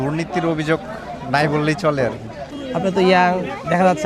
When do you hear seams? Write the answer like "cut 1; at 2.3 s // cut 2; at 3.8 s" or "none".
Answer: cut 1; at 2.6 s